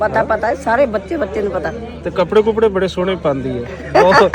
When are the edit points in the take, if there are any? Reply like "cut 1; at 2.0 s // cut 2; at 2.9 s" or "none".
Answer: none